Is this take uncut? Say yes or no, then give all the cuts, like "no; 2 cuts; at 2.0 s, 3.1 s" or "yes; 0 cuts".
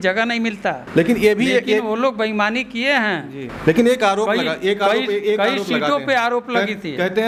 yes; 0 cuts